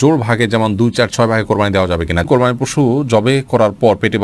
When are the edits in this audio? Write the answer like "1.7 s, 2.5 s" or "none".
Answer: 2.2 s